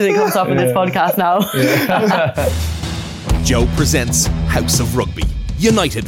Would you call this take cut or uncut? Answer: cut